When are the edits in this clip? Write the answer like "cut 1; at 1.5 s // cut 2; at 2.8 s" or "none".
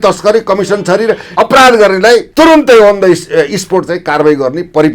cut 1; at 1.3 s // cut 2; at 2.3 s